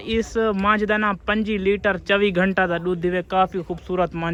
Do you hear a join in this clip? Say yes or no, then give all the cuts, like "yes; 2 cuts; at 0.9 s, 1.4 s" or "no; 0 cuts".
no; 0 cuts